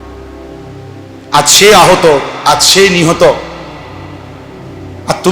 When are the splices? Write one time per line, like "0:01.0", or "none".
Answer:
0:01.3